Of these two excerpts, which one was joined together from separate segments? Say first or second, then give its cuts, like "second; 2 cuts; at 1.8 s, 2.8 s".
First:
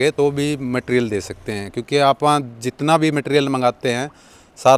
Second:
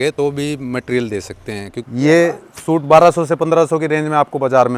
second; 1 cut; at 1.8 s